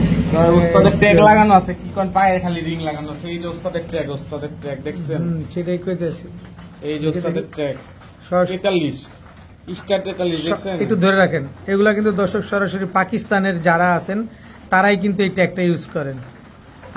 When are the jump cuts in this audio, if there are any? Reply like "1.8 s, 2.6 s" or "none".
none